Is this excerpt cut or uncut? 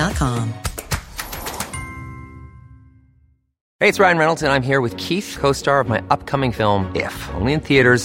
cut